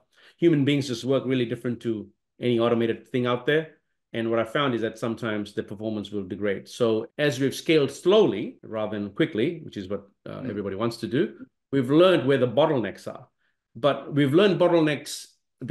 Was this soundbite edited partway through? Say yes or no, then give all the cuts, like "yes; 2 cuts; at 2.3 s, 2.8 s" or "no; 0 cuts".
no; 0 cuts